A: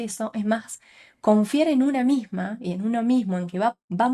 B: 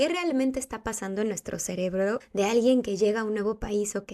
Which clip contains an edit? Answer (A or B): B